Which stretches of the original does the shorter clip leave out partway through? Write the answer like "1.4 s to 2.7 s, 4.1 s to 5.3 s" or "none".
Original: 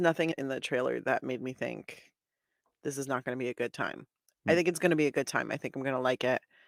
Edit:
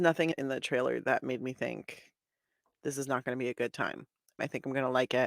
4.3 s to 5.4 s